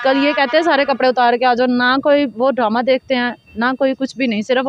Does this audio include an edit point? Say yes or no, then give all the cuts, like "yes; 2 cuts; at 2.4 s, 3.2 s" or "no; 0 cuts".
no; 0 cuts